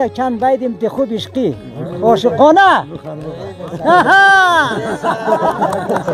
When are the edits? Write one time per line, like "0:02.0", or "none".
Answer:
none